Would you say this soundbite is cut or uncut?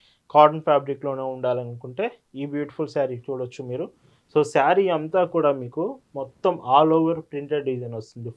uncut